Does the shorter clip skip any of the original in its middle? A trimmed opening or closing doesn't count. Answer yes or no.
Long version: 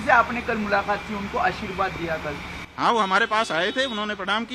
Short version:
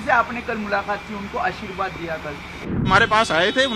yes